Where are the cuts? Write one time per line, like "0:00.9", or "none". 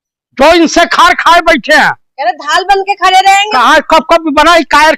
0:02.1
0:03.5

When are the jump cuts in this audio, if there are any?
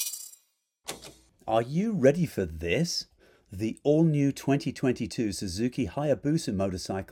0:01.3

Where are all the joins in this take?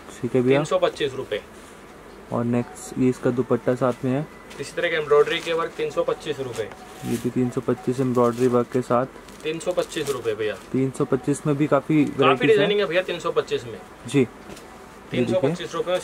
none

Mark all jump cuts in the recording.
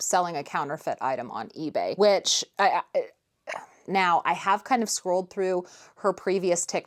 none

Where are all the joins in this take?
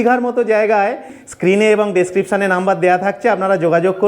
0:01.1

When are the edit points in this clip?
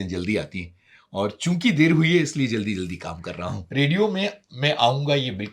0:03.6

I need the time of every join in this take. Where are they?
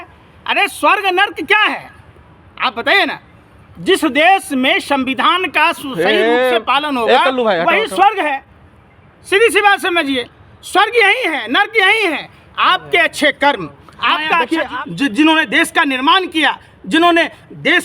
0:14.7

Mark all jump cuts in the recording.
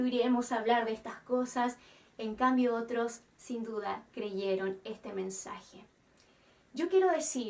0:04.0

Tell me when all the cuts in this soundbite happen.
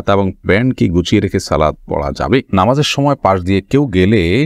0:02.5

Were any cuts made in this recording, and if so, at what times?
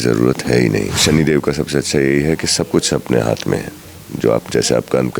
0:01.0

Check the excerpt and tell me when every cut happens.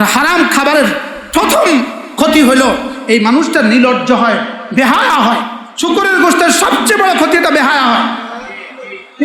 0:05.6

